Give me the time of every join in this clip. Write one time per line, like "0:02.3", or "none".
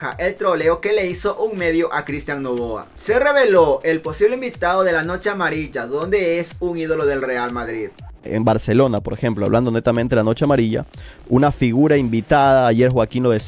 0:02.9
0:08.1